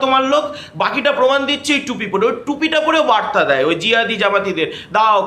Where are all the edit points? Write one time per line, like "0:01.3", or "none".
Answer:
none